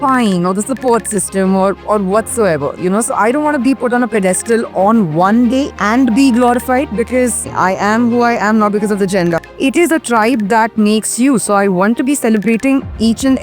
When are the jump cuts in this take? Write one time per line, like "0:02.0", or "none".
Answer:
0:05.7
0:07.5
0:09.4

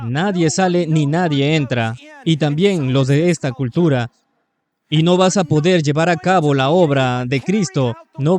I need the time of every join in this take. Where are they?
none

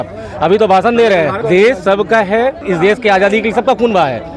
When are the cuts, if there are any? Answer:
0:01.4
0:02.6

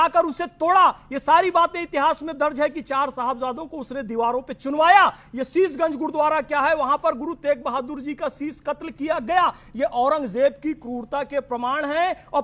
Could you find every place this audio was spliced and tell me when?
none

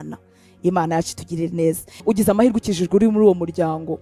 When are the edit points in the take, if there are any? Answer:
0:01.9

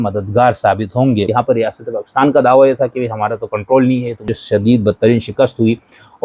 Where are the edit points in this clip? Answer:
0:01.3
0:04.3

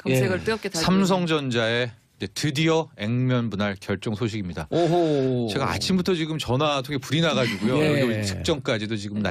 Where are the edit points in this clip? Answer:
none

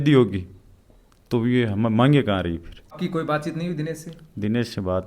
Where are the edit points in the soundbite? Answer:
0:03.0

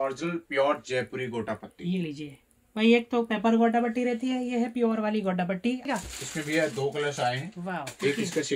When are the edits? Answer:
0:05.9

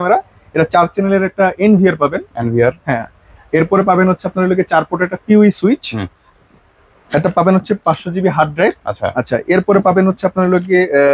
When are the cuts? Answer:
none

